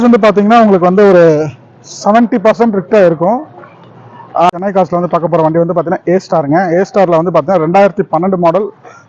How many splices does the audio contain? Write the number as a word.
one